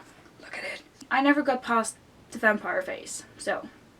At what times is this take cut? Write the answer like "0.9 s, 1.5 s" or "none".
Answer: 1.0 s

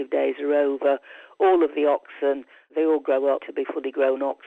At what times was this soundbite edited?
2.7 s, 3.5 s

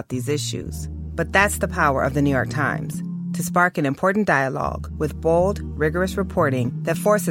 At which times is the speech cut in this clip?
none

